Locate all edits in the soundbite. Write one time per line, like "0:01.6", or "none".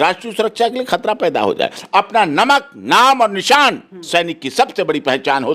0:01.8